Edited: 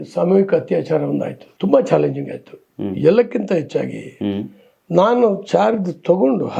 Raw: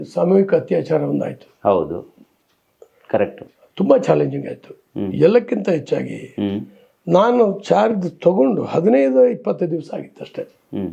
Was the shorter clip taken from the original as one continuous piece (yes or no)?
no